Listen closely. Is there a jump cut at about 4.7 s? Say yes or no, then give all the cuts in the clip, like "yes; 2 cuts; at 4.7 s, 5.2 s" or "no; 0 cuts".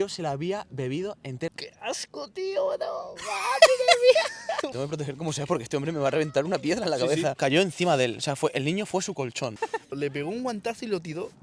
yes; 4 cuts; at 1.5 s, 4.7 s, 7.4 s, 9.9 s